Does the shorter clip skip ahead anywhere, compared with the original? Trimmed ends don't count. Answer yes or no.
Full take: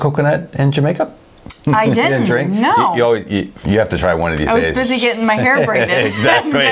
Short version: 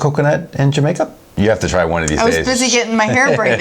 yes